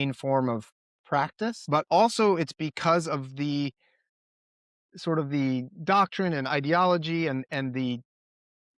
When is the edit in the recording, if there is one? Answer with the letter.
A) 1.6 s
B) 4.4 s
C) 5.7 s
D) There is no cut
A